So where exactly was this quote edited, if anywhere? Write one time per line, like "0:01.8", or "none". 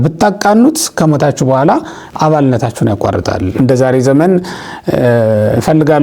0:03.5